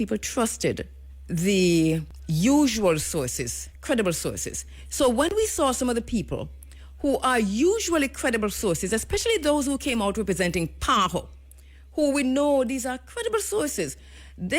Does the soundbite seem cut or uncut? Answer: cut